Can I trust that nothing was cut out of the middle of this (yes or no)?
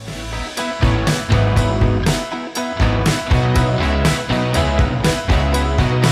yes